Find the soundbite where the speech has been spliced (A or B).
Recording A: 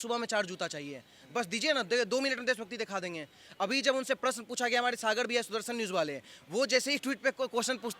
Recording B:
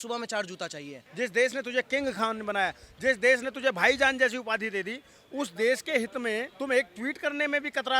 B